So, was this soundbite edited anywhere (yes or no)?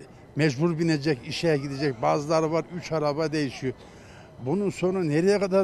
no